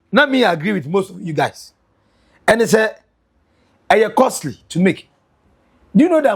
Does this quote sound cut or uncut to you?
uncut